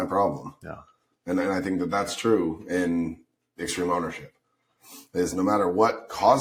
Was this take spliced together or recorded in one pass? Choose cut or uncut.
uncut